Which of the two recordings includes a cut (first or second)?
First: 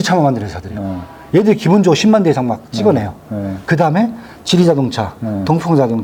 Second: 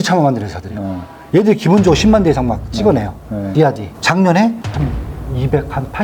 second